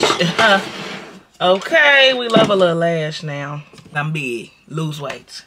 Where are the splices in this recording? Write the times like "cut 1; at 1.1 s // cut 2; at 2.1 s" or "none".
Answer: cut 1; at 3.9 s